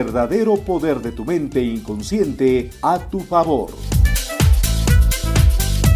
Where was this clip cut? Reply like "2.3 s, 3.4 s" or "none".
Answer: 3.8 s